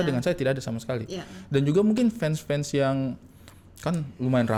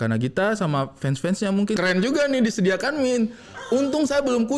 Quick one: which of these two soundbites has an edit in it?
second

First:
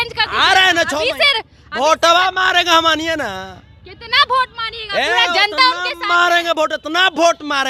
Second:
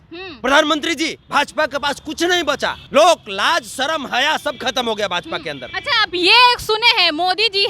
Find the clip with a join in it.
second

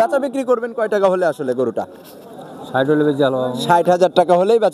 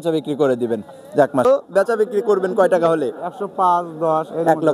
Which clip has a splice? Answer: second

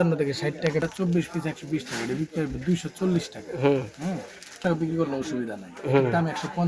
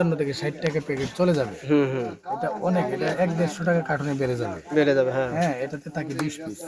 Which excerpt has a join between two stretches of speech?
first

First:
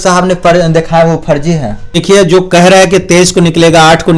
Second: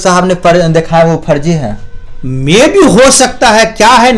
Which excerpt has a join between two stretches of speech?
first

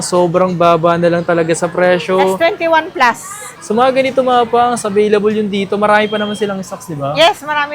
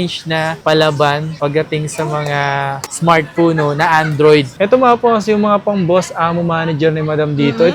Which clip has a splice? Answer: second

